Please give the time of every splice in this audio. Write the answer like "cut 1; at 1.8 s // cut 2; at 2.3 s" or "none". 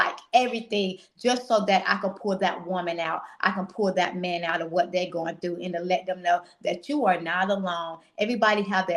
none

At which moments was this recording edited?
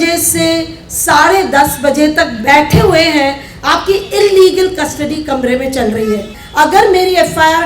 cut 1; at 6.4 s

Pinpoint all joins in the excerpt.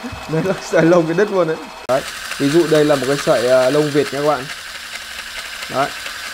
cut 1; at 1.7 s

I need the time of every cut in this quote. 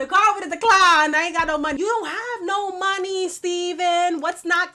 cut 1; at 1.8 s

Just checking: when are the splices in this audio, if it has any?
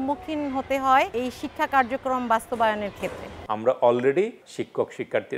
cut 1; at 1.1 s // cut 2; at 3.3 s // cut 3; at 4.5 s

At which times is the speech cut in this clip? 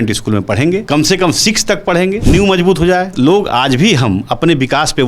cut 1; at 0.8 s // cut 2; at 2.2 s // cut 3; at 3.1 s

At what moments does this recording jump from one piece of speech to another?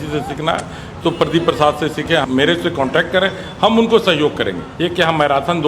cut 1; at 2.2 s // cut 2; at 4.6 s

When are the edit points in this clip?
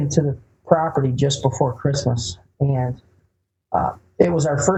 none

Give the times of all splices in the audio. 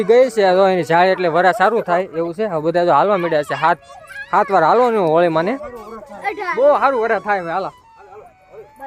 none

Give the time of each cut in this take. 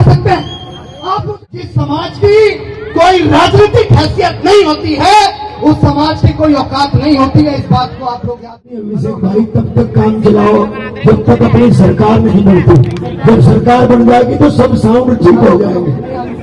cut 1; at 1.2 s // cut 2; at 8.8 s

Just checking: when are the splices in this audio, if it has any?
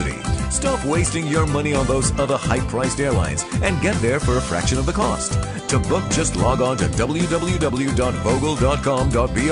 none

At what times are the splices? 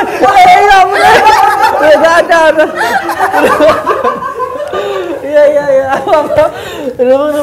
none

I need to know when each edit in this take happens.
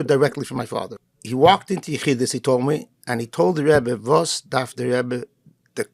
cut 1; at 1.0 s

